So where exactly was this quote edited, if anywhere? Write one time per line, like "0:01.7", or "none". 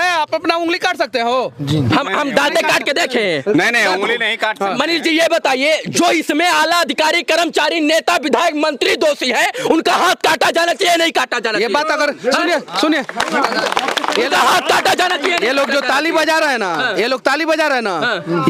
none